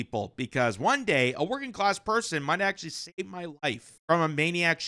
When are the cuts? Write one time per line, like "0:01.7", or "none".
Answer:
0:03.9